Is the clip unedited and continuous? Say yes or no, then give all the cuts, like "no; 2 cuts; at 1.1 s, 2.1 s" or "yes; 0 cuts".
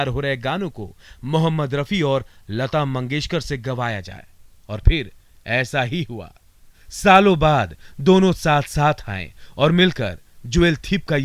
yes; 0 cuts